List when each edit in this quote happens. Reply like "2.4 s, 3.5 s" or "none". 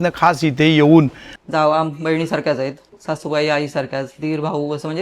1.2 s, 2.9 s